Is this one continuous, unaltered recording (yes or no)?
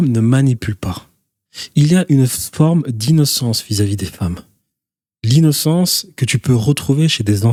yes